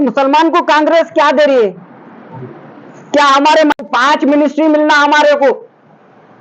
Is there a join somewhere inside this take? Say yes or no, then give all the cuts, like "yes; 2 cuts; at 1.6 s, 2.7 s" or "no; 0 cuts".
yes; 1 cut; at 3.7 s